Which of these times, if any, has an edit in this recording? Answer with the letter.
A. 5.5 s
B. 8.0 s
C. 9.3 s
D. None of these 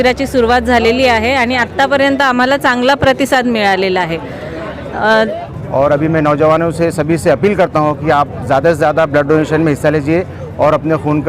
A